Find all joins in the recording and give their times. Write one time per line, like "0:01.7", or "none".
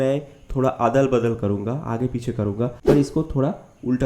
0:02.8